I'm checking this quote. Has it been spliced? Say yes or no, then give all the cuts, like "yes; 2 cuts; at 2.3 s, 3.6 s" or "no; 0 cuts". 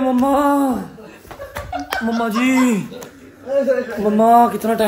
no; 0 cuts